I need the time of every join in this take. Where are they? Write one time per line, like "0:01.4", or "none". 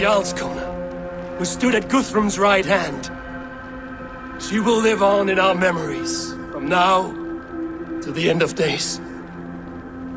none